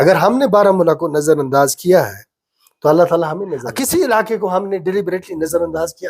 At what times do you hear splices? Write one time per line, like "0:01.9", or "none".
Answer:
0:03.6